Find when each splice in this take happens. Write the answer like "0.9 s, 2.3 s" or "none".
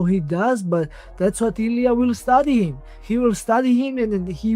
none